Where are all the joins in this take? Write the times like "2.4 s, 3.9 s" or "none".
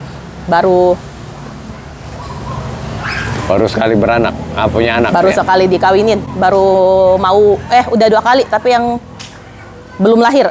none